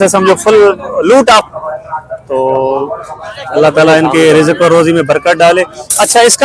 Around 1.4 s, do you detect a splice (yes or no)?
yes